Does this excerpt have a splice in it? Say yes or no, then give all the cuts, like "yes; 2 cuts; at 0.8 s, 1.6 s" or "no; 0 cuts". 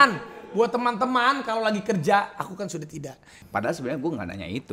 yes; 1 cut; at 3.4 s